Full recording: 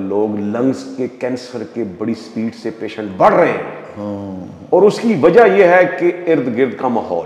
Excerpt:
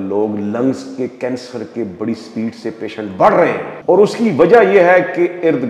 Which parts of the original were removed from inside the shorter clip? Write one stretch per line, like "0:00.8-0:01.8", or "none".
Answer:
0:03.7-0:04.5